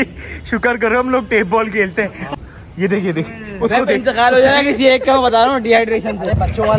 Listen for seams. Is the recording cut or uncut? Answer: cut